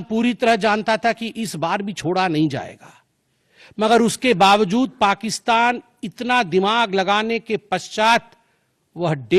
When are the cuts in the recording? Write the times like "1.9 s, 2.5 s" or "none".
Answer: none